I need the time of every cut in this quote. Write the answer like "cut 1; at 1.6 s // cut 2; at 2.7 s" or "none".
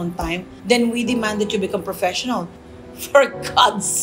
cut 1; at 2.5 s